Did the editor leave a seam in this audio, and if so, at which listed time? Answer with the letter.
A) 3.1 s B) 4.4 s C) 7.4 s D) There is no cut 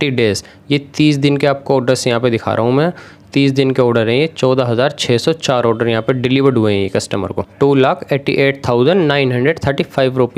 C